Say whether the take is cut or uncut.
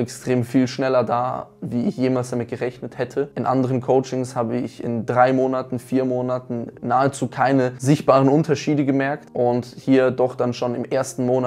uncut